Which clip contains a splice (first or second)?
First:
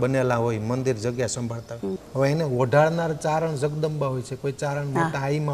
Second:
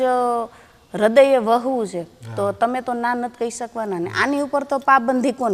first